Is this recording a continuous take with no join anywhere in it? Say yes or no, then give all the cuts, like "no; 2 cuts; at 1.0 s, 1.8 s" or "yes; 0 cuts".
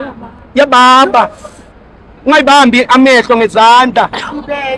yes; 0 cuts